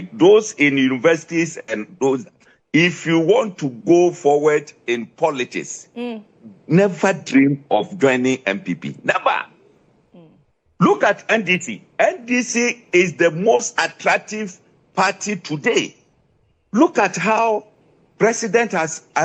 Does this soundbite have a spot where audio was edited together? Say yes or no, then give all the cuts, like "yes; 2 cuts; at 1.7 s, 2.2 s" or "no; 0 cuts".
no; 0 cuts